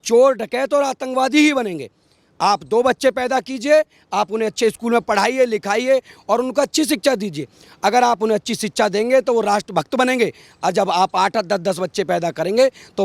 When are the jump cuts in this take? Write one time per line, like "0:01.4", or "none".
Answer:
none